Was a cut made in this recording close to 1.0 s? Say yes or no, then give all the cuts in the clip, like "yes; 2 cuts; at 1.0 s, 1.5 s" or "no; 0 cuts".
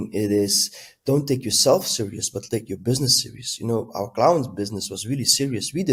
no; 0 cuts